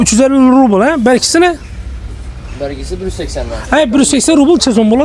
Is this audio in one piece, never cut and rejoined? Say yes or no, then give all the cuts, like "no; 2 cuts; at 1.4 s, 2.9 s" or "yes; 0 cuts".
yes; 0 cuts